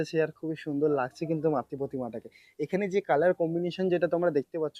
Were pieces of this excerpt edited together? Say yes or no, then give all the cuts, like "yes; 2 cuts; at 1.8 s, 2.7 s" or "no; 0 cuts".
no; 0 cuts